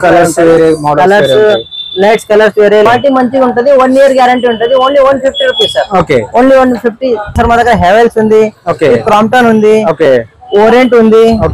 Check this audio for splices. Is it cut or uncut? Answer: cut